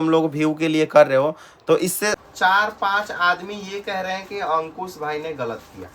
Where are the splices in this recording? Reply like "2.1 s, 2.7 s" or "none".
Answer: 2.2 s